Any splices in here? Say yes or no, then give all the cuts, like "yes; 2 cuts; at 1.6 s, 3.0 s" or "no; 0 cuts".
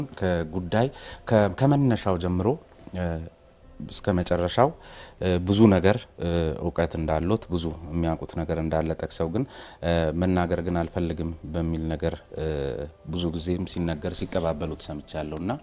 no; 0 cuts